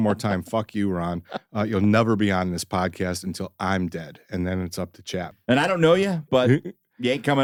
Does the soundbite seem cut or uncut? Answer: uncut